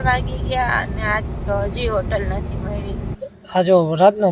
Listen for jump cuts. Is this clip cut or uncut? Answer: cut